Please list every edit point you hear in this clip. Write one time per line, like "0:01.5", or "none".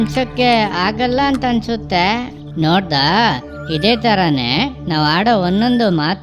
0:02.4